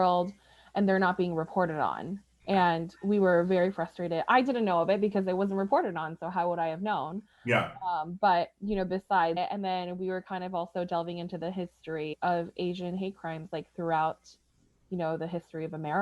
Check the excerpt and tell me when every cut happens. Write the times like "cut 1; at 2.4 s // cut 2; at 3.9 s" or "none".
cut 1; at 9.4 s // cut 2; at 12.1 s